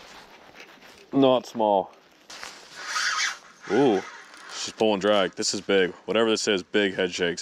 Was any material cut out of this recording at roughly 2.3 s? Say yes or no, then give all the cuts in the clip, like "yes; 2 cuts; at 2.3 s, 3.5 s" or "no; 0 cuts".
yes; 1 cut; at 2.3 s